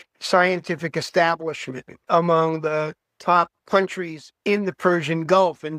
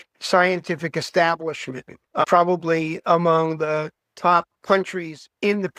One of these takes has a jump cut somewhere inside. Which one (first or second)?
first